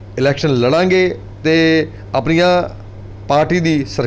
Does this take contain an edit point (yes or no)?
no